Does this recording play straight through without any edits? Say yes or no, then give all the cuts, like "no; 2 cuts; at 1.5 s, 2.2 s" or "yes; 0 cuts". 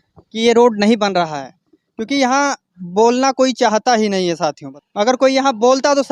no; 1 cut; at 4.7 s